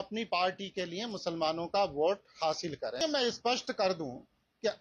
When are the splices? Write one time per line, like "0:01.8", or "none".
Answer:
0:03.0